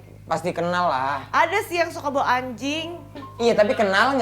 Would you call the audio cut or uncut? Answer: cut